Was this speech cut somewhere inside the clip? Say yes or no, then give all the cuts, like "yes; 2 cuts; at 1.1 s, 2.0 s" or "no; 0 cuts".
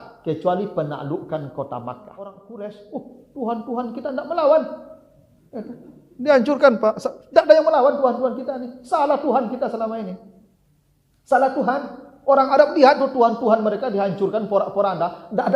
yes; 1 cut; at 2.4 s